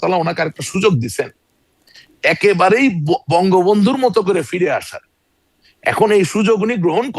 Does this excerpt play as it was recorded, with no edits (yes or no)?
yes